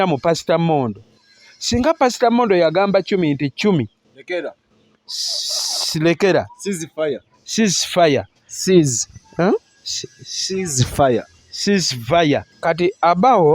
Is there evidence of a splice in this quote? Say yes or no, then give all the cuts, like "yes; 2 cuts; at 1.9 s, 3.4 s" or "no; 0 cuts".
yes; 1 cut; at 12.5 s